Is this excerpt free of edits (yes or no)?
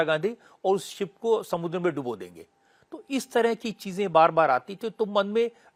yes